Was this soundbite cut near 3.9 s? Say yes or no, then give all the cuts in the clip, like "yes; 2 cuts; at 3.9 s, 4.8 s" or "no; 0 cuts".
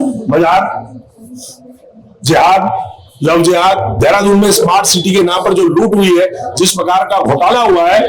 yes; 1 cut; at 3.9 s